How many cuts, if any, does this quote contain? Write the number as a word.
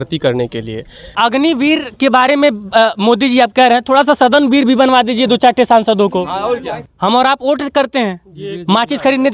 two